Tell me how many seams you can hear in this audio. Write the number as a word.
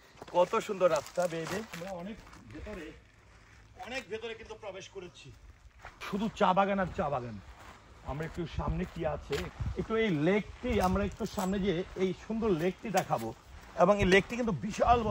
three